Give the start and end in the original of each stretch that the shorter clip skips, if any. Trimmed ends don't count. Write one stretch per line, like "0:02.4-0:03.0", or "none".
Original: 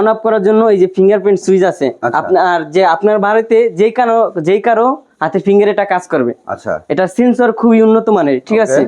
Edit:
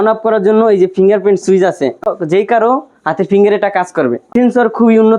0:02.1-0:04.2
0:06.4-0:07.1